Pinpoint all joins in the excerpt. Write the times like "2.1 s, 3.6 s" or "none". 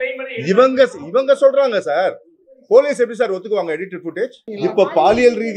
4.4 s